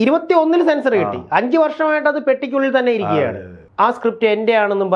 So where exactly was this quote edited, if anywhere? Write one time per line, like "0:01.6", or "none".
0:03.6